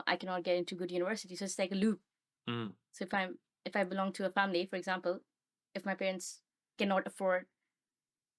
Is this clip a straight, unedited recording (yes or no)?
yes